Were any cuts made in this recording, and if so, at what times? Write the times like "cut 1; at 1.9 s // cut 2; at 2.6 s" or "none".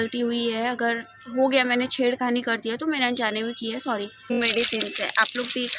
cut 1; at 4.4 s